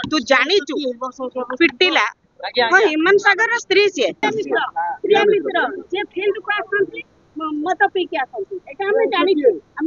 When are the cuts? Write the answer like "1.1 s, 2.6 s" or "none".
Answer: 4.2 s